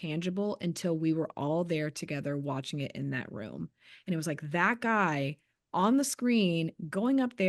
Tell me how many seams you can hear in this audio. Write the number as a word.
zero